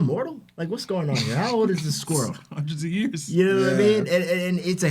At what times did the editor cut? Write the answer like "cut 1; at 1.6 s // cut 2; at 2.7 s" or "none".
none